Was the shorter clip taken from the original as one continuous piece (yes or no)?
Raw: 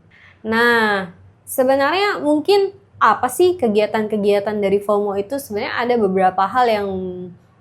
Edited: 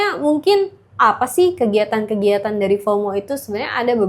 yes